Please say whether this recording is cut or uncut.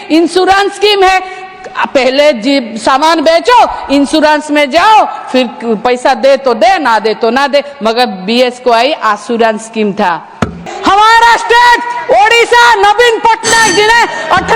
cut